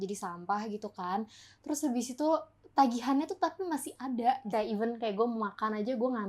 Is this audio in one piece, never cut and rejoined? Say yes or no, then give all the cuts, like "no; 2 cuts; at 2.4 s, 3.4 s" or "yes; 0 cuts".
no; 1 cut; at 4.5 s